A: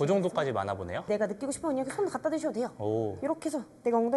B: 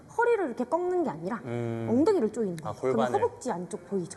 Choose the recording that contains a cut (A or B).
A